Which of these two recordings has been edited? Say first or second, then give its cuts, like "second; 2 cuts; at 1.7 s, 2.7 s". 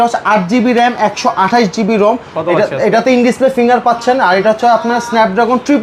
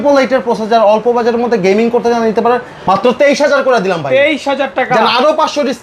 second; 1 cut; at 2.7 s